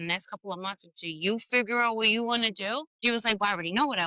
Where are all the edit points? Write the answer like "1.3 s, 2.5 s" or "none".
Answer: 3.0 s